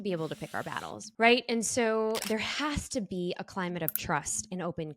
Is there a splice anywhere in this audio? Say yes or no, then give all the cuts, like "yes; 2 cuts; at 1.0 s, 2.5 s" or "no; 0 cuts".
yes; 1 cut; at 1.0 s